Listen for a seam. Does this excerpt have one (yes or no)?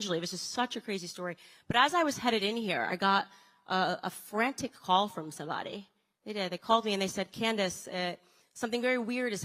no